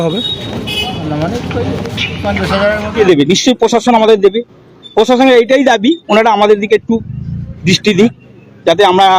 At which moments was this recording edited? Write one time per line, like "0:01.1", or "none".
0:02.9